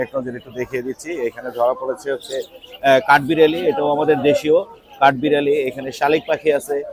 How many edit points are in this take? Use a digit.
0